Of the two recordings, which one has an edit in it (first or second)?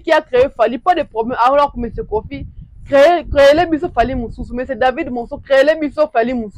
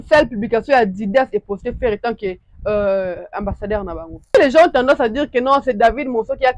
second